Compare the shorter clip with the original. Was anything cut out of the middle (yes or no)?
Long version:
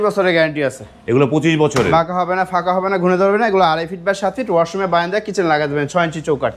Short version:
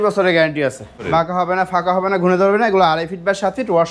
yes